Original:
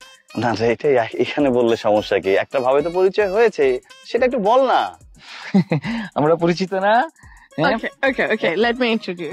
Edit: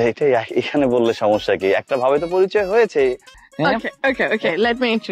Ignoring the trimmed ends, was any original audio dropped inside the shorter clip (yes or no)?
yes